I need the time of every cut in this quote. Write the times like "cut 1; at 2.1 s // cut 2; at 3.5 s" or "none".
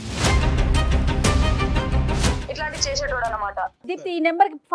cut 1; at 3.8 s